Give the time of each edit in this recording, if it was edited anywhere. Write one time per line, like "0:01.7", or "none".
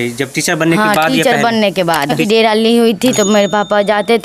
0:02.2